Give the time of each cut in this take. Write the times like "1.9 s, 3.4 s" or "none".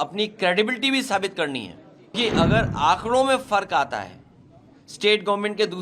2.1 s